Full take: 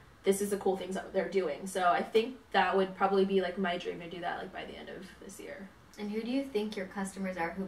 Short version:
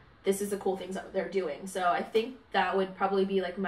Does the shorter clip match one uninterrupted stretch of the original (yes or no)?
yes